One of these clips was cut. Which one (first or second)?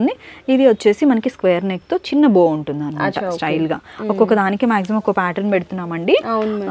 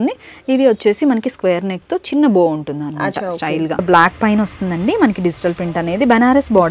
second